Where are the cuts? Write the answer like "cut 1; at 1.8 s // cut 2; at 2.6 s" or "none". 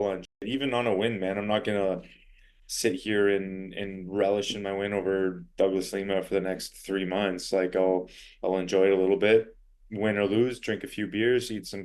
none